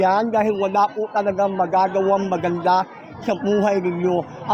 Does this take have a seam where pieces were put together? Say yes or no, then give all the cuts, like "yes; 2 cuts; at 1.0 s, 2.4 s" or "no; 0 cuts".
no; 0 cuts